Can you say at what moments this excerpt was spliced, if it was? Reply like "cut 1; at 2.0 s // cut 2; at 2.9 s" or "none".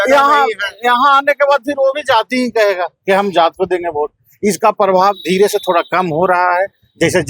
none